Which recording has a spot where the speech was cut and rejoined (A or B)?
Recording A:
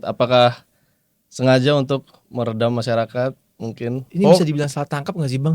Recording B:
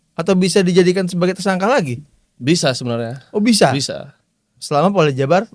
A